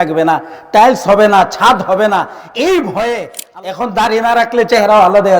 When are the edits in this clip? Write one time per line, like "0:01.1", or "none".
0:03.4